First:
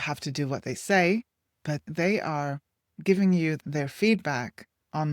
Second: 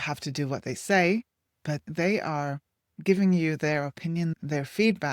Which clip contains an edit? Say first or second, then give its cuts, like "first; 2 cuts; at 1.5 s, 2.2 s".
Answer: first; 1 cut; at 3.6 s